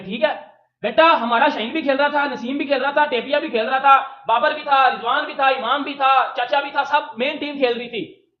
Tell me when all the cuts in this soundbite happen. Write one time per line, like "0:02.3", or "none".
none